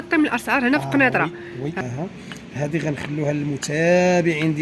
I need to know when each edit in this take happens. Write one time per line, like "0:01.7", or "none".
0:01.9